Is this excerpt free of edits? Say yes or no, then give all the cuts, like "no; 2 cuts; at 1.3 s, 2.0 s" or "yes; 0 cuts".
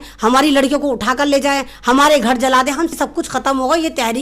no; 1 cut; at 2.9 s